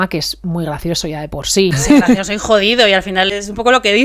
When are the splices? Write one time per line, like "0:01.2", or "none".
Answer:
0:01.8
0:03.3